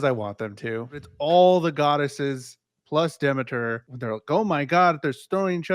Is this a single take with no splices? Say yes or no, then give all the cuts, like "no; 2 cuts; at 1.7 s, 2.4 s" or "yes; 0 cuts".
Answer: no; 2 cuts; at 1.1 s, 3.9 s